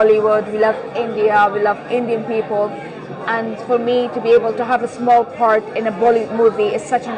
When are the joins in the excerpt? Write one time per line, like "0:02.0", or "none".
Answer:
none